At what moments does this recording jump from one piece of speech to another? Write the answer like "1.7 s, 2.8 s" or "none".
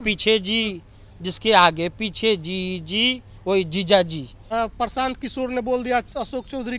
4.3 s